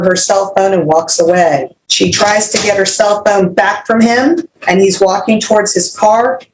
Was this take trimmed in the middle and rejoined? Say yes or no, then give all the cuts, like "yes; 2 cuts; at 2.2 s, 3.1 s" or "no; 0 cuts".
yes; 2 cuts; at 1.8 s, 4.5 s